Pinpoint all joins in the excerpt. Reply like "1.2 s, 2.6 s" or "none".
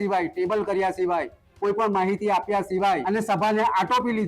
3.0 s